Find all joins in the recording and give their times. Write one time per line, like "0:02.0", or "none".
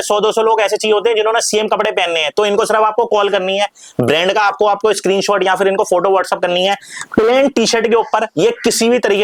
none